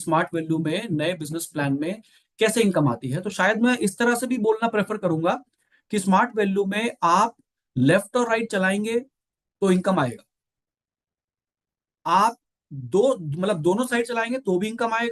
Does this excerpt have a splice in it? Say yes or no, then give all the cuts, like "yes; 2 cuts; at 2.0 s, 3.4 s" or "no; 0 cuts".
no; 0 cuts